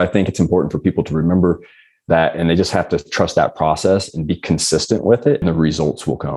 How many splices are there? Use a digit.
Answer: 1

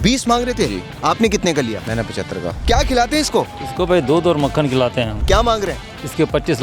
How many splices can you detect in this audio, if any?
2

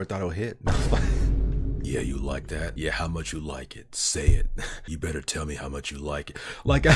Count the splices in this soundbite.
0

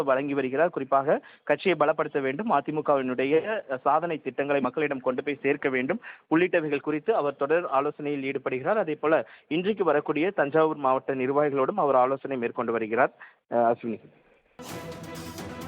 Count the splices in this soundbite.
1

